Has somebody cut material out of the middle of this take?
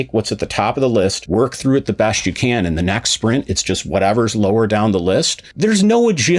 yes; 1 cut; at 1.2 s

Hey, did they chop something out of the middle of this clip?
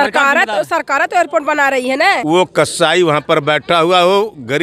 yes; 1 cut; at 2.1 s

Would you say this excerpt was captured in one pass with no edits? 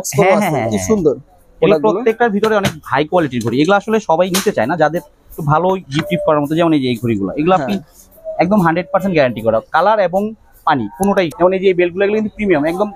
no; 1 cut; at 11.3 s

